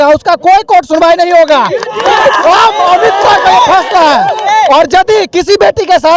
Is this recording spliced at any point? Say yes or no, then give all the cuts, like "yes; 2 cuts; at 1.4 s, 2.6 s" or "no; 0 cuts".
no; 0 cuts